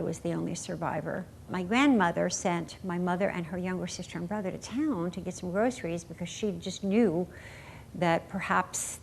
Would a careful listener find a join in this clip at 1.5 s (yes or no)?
yes